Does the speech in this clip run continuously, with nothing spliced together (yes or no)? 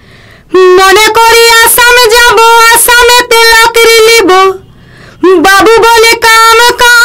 yes